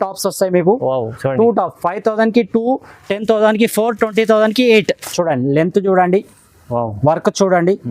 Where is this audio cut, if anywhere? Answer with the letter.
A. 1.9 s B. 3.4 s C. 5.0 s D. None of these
C